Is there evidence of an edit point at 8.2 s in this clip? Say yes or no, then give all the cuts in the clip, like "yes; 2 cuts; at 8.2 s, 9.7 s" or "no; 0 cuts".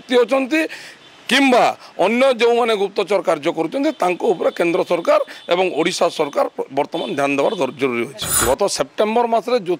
yes; 1 cut; at 8.2 s